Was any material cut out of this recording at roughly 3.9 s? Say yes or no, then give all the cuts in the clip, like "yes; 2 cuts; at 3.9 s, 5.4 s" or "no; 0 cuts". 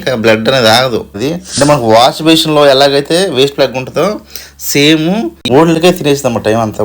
no; 2 cuts; at 1.2 s, 5.4 s